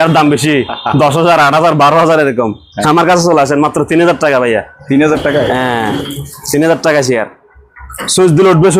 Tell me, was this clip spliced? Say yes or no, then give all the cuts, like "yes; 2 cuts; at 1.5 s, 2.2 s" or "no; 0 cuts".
no; 0 cuts